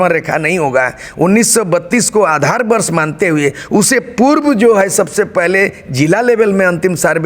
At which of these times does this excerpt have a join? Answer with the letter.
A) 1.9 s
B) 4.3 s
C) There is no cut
C